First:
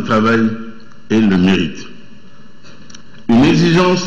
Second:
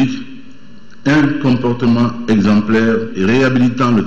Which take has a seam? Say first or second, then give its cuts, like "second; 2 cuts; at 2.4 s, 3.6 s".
second; 1 cut; at 3.1 s